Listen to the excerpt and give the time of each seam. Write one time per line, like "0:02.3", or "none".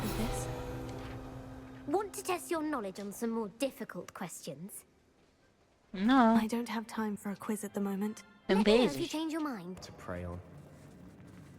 0:09.8